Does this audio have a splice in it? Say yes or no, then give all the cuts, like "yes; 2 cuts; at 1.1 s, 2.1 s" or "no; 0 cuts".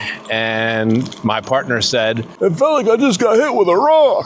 yes; 1 cut; at 2.3 s